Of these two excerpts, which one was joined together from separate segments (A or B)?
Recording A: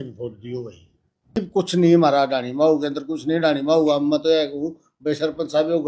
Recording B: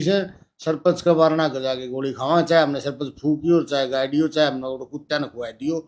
A